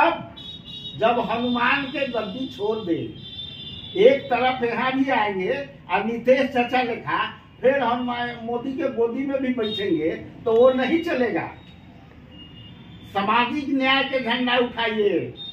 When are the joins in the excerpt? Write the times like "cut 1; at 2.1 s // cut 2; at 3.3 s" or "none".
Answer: none